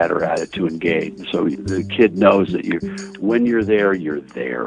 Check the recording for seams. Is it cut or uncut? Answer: uncut